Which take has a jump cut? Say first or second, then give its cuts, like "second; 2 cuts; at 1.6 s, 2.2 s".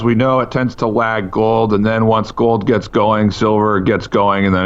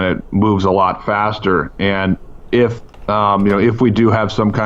second; 1 cut; at 2.9 s